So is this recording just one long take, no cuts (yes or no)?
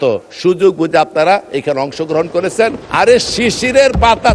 no